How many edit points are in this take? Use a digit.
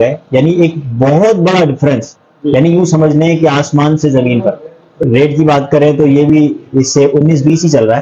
1